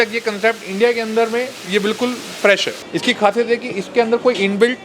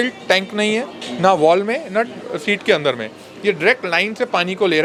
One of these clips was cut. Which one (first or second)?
first